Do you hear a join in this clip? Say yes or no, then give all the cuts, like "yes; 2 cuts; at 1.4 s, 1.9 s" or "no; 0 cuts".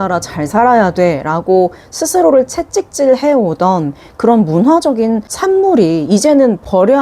no; 0 cuts